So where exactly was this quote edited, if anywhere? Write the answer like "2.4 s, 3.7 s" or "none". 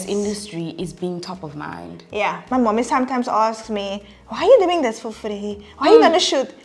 2.4 s